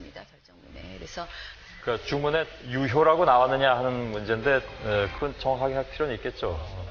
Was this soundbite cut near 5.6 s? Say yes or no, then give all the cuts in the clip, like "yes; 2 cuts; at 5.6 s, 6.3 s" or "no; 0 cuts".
yes; 1 cut; at 5.6 s